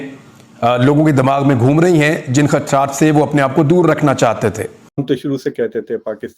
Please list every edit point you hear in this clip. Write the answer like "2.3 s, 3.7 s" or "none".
5.0 s